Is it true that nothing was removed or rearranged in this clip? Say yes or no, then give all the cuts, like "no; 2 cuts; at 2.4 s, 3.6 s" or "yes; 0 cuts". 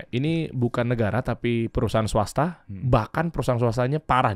yes; 0 cuts